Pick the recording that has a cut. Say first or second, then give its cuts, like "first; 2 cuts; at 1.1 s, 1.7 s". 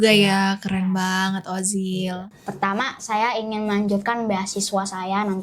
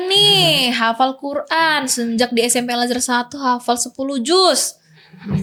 first; 1 cut; at 2.3 s